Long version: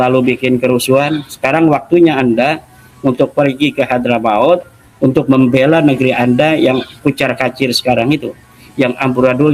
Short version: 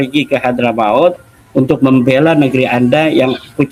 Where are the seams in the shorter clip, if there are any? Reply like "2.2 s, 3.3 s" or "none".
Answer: none